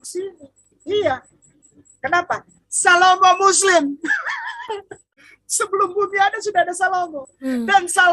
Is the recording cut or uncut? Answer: cut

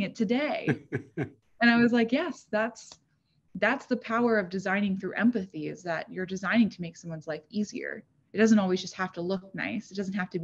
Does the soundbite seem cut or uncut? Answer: uncut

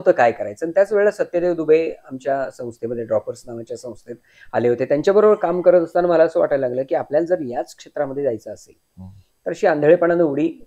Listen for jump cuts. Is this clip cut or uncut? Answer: uncut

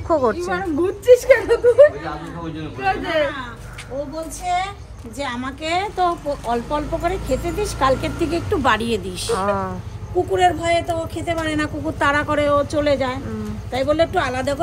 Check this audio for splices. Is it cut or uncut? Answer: uncut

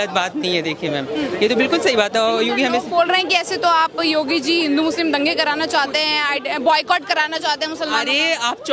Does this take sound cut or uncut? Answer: uncut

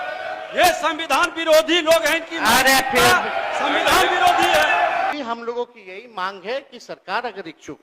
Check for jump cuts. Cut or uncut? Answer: cut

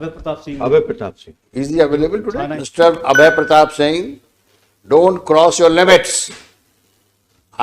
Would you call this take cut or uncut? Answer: cut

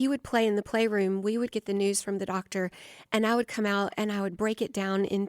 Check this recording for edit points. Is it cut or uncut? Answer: cut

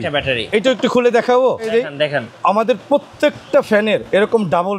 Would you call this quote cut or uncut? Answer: cut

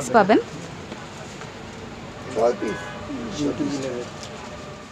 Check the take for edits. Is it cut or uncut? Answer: uncut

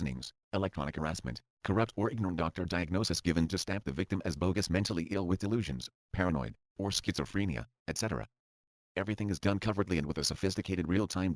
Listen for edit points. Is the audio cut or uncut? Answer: cut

